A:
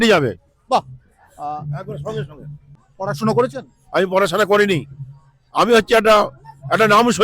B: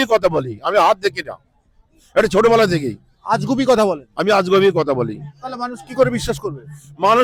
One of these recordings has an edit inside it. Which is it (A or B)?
A